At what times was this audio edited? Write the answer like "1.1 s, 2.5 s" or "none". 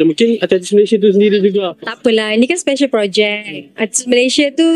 none